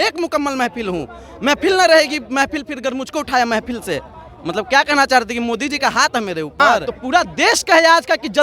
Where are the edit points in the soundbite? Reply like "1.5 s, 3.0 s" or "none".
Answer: 6.9 s